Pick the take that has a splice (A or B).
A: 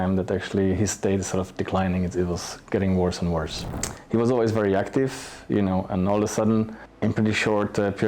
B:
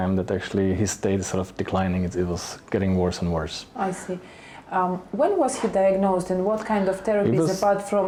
A